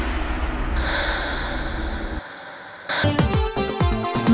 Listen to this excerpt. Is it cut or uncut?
cut